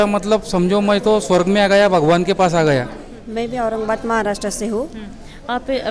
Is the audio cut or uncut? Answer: uncut